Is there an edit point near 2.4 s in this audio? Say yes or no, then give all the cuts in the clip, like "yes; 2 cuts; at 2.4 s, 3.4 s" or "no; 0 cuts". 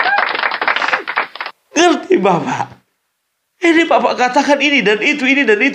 no; 1 cut; at 1.2 s